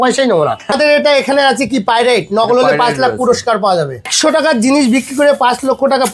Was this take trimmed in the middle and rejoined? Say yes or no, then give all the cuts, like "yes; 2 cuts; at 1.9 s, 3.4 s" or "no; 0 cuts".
yes; 2 cuts; at 0.7 s, 4.1 s